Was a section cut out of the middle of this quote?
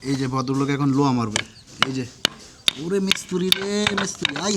no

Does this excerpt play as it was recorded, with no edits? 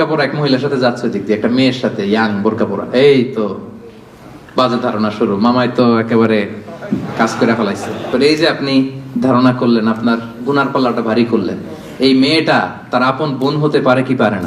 no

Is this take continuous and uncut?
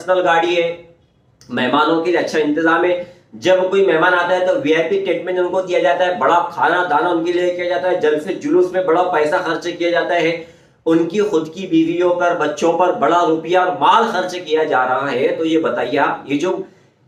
yes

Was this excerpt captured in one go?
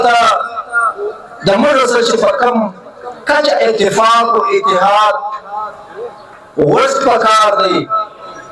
yes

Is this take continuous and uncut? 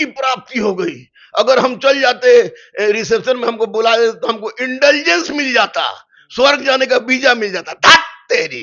yes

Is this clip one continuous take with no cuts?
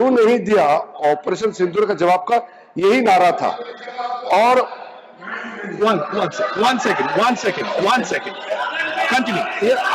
yes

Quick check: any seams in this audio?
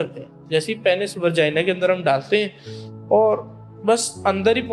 no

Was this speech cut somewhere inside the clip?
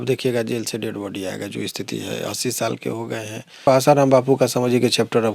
yes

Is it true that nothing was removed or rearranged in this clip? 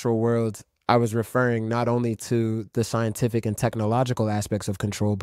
yes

